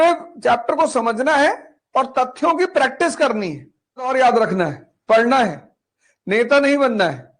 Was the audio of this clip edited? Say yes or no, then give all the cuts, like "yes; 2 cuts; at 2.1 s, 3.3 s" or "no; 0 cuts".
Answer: yes; 1 cut; at 4.1 s